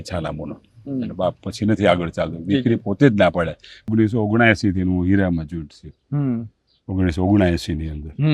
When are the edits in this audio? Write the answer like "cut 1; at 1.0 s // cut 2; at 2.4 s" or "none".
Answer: cut 1; at 3.9 s